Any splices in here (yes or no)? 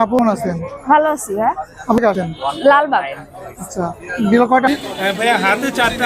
yes